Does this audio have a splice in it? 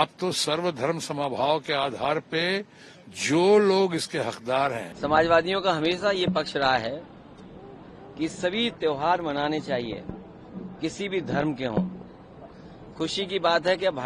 yes; 1 cut; at 4.9 s

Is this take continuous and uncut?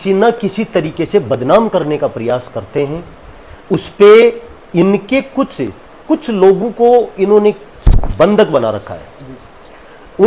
yes; 0 cuts

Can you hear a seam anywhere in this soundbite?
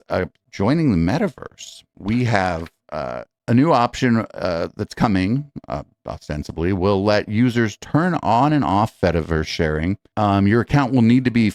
no; 0 cuts

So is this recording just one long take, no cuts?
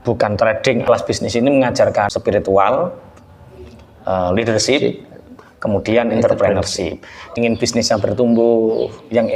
no; 3 cuts; at 0.8 s, 2.1 s, 7.3 s

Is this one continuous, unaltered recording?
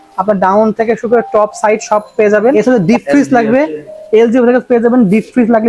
no; 1 cut; at 2.5 s

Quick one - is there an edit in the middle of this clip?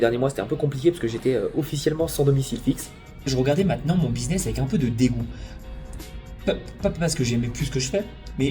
yes; 1 cut; at 3.2 s

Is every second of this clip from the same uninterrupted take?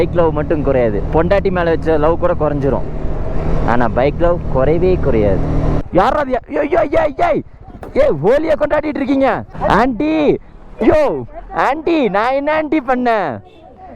no; 2 cuts; at 5.8 s, 9.5 s

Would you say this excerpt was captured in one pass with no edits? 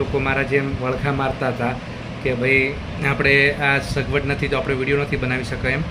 yes; 0 cuts

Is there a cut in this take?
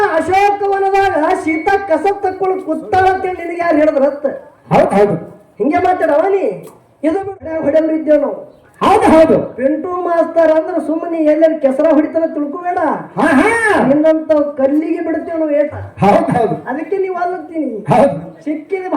yes; 1 cut; at 7.2 s

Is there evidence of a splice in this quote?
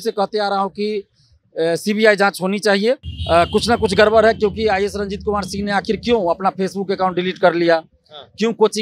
yes; 1 cut; at 3.1 s

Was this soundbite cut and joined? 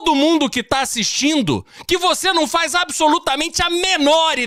no; 0 cuts

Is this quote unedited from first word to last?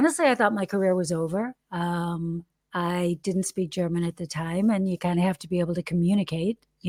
yes; 0 cuts

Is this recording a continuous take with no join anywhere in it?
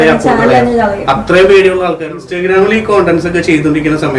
no; 1 cut; at 2.2 s

